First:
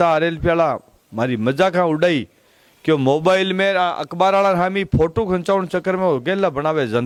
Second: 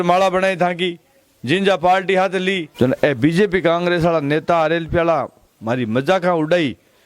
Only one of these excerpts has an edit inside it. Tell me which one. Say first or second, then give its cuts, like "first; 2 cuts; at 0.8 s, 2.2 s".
second; 1 cut; at 2.7 s